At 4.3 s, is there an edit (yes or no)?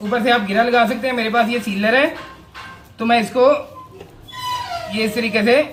no